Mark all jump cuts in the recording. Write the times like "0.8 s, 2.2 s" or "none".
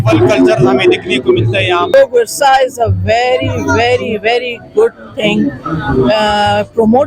1.9 s

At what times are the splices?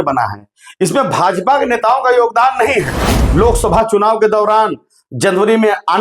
3.2 s

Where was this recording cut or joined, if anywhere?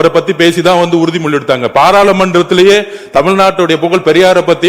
none

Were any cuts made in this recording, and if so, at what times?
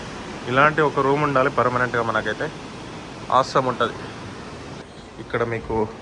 4.8 s

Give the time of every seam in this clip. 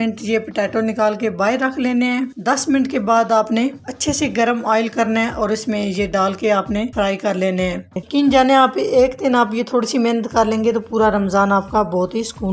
6.9 s, 8.0 s

